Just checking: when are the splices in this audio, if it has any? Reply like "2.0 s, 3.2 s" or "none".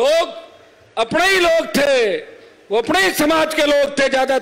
none